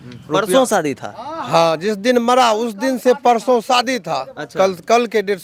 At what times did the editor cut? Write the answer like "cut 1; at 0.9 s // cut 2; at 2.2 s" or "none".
none